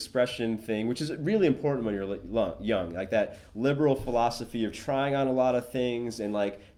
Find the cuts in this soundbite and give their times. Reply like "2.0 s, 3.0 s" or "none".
none